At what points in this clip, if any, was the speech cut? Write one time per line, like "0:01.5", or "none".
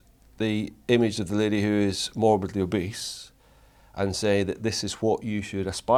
none